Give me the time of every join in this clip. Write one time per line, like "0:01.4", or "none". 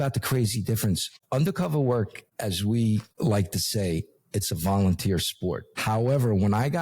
0:01.1
0:02.2
0:03.1
0:05.7